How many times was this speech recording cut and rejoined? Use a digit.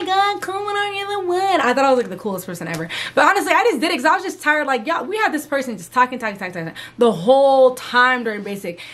0